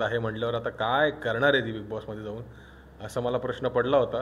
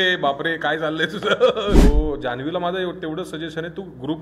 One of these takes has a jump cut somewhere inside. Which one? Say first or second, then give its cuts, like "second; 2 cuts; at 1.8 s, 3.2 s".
second; 1 cut; at 1.8 s